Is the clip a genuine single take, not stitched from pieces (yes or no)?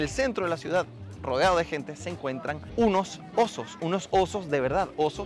yes